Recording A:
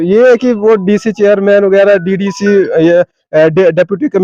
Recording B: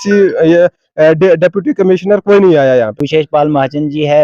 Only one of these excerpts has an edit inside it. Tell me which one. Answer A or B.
B